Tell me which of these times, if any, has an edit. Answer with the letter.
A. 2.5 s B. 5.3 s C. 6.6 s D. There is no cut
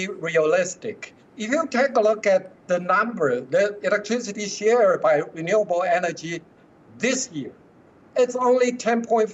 D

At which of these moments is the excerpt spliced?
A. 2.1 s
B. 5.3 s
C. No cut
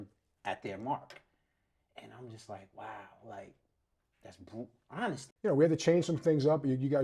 B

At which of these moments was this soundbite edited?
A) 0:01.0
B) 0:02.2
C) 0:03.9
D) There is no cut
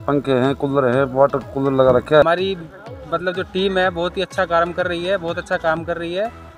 B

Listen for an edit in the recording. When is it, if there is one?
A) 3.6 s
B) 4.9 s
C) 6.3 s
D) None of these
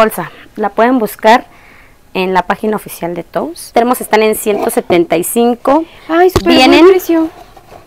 A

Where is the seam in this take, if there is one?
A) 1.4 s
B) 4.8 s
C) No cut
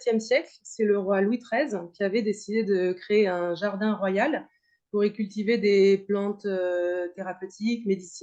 C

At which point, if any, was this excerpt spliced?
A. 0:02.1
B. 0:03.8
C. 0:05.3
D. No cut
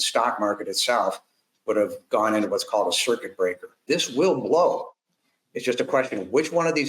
B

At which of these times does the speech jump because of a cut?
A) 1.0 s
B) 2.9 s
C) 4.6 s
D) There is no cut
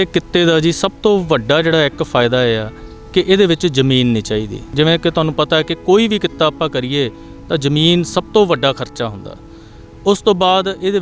C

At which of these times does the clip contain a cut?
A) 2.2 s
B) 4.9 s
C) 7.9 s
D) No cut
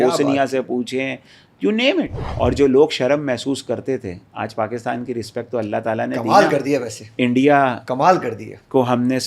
A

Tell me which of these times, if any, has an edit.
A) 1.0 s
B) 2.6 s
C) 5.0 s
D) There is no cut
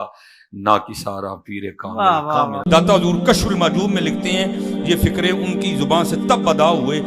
B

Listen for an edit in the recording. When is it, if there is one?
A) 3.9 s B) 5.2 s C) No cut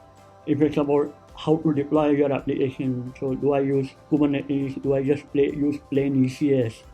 A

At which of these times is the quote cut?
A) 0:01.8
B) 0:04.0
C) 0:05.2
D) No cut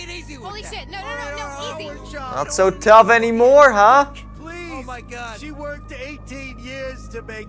A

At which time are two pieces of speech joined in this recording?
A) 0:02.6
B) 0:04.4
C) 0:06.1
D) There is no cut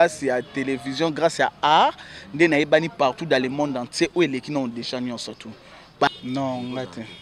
C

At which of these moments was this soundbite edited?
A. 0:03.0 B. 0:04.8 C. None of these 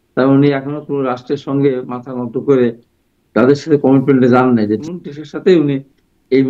B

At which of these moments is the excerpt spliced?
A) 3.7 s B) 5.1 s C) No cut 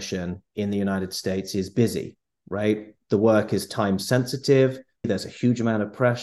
B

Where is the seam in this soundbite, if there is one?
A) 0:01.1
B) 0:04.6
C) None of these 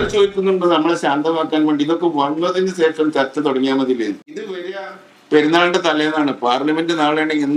B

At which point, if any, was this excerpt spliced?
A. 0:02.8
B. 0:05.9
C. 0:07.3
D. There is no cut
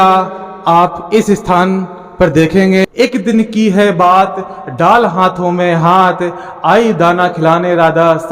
A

